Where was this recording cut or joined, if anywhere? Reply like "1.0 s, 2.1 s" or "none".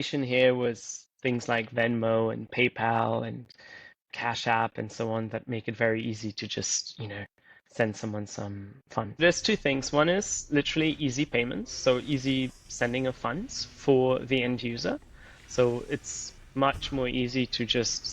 9.2 s